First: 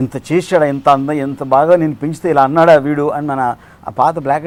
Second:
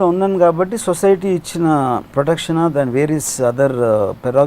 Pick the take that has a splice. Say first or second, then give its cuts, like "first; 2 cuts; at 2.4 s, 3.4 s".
second; 1 cut; at 2.1 s